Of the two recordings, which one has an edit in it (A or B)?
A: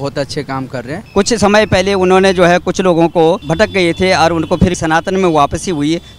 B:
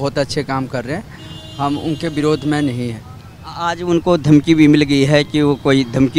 A